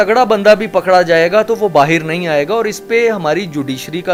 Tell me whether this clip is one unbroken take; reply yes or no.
yes